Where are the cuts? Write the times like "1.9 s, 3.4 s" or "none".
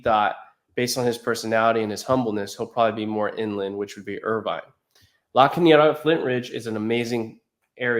none